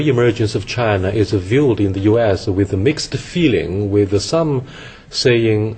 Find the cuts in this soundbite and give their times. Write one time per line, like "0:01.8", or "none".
none